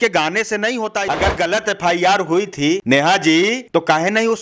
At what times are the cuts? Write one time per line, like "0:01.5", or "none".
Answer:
0:01.0
0:02.8

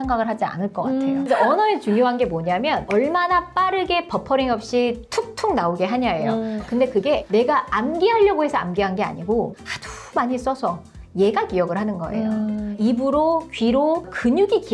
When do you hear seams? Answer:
0:01.2
0:06.6
0:12.7

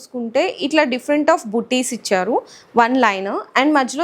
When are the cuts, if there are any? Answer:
none

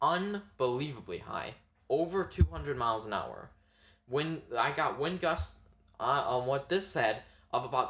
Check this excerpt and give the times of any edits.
none

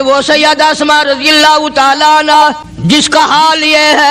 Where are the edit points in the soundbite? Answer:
0:02.7

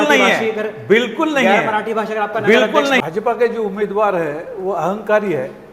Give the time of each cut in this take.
0:03.0

